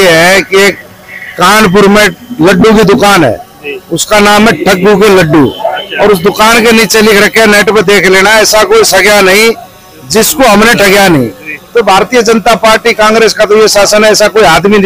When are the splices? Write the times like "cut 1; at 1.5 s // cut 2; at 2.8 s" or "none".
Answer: none